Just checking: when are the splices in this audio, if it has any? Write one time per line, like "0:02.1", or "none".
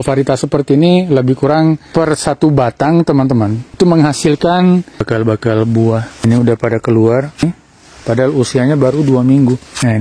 0:01.8
0:03.6
0:05.0
0:06.2
0:07.4